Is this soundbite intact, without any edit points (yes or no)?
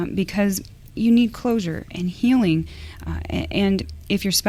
yes